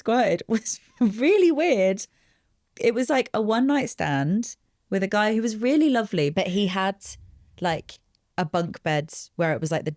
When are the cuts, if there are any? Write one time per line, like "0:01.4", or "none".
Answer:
0:06.3